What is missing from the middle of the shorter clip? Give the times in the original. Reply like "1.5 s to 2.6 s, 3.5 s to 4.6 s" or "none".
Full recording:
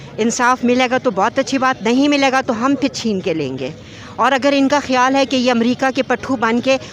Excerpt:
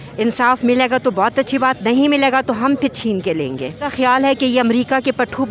3.9 s to 4.8 s